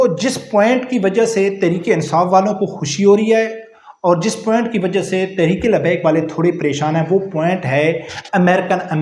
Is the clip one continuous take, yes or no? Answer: yes